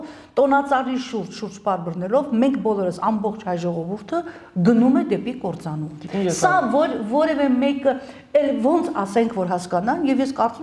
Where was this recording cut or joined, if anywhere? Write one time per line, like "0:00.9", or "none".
none